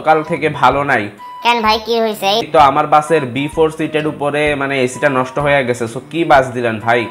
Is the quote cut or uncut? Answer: uncut